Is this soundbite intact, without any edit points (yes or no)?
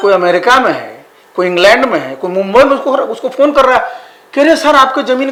yes